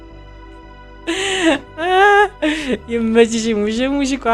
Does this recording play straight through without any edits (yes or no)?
no